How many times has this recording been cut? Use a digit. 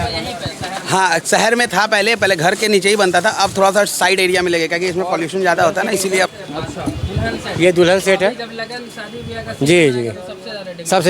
1